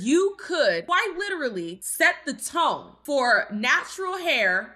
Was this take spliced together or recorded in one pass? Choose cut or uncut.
cut